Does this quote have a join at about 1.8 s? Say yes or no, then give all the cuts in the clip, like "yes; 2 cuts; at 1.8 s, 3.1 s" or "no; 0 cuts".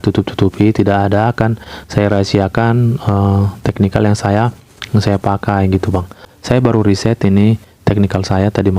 no; 1 cut; at 6.3 s